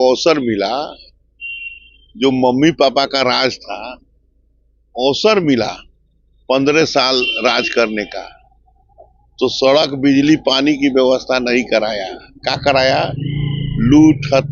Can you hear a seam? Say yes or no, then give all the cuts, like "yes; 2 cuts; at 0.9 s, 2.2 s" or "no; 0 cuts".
no; 0 cuts